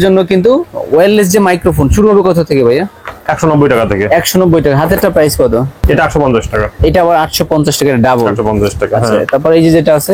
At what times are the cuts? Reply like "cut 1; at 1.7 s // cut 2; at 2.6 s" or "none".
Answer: none